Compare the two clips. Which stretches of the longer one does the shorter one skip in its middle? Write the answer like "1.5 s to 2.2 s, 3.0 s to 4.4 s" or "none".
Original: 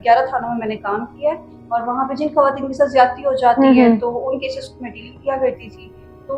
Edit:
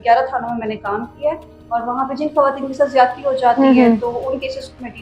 none